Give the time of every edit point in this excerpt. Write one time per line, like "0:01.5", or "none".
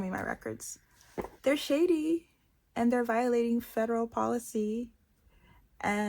0:01.3